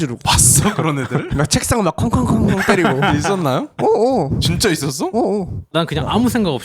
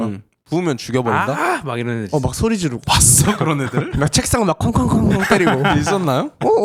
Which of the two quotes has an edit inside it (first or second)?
first